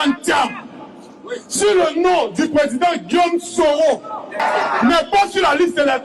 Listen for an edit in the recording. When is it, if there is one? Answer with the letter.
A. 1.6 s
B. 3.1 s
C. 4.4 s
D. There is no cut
C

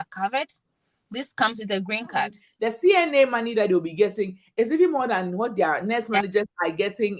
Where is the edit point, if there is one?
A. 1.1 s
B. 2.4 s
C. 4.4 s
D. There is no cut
B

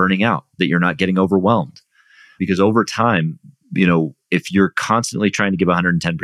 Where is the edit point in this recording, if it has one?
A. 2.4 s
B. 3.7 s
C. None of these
A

